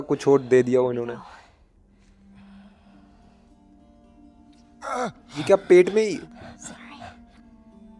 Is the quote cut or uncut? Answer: uncut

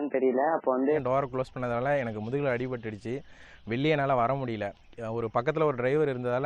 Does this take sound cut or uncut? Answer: cut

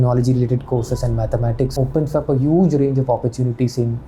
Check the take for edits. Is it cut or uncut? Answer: cut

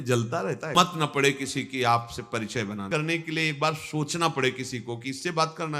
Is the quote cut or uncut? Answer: cut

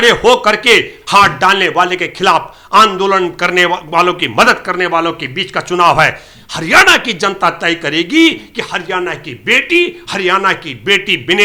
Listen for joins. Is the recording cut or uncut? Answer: uncut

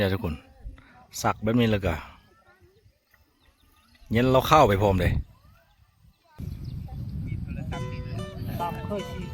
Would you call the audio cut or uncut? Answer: cut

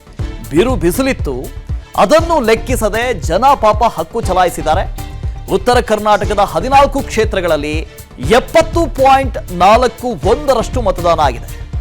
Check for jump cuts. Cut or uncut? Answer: cut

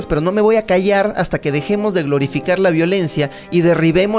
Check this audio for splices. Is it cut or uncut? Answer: uncut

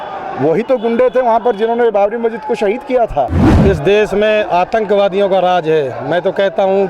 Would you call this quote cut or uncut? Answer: cut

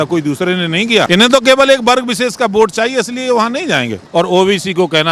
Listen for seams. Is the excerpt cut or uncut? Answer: cut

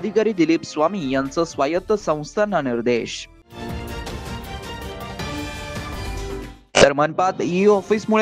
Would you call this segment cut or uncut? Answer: uncut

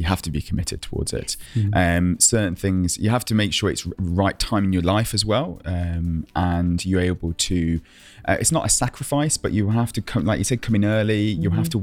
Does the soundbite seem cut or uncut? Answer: uncut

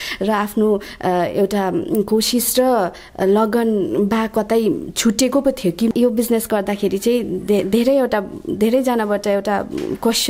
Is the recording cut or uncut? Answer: cut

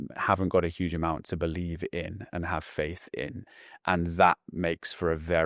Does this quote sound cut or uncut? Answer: uncut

